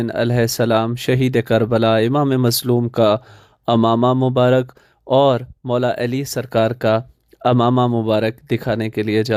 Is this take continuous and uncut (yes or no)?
yes